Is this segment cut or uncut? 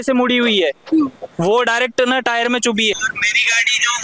cut